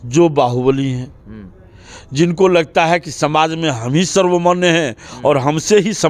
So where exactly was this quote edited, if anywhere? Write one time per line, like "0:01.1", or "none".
none